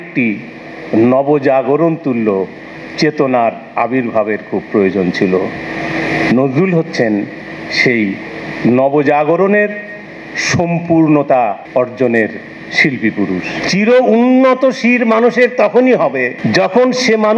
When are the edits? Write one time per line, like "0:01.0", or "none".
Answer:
0:11.6
0:13.6
0:16.3